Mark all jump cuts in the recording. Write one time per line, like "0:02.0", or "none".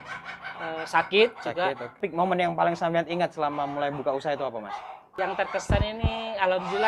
0:02.0
0:05.1